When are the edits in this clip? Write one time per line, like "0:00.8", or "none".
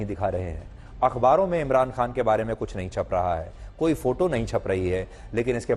none